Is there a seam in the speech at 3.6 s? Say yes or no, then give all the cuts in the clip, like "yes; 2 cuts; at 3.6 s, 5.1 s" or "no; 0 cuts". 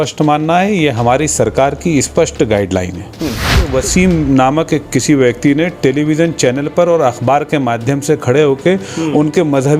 yes; 1 cut; at 3.6 s